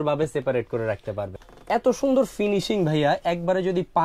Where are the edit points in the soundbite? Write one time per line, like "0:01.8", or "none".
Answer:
0:01.3